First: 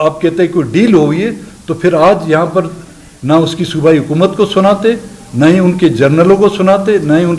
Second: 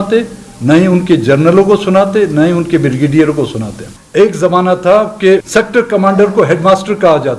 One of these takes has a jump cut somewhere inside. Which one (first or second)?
second